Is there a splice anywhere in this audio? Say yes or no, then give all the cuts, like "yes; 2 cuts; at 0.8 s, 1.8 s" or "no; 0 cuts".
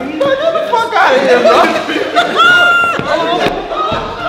no; 0 cuts